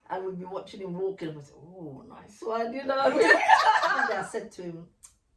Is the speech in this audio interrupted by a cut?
yes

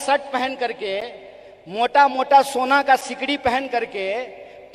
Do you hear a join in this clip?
no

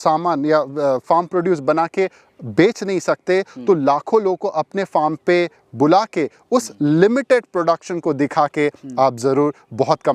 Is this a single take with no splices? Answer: yes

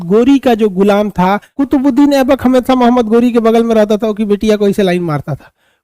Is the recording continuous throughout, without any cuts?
no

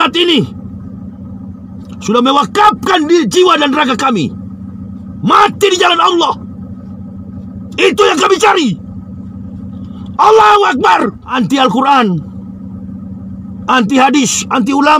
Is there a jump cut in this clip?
yes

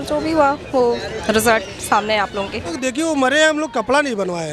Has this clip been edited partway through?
yes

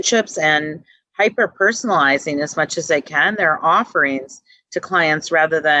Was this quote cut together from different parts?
no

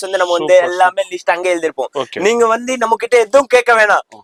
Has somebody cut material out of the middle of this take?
no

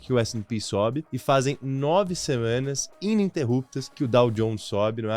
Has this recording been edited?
yes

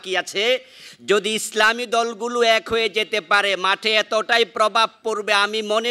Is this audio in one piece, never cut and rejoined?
yes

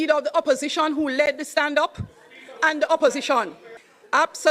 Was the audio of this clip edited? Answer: yes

